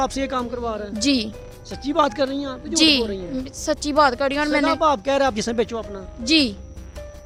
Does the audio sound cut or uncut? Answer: uncut